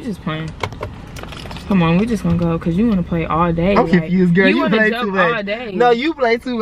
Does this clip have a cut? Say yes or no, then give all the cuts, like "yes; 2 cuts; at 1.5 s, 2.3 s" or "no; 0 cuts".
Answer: no; 0 cuts